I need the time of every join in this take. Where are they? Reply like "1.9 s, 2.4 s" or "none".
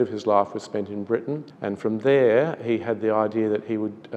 1.5 s